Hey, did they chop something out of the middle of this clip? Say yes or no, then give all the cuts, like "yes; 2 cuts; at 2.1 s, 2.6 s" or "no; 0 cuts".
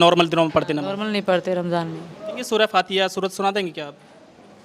yes; 1 cut; at 2.4 s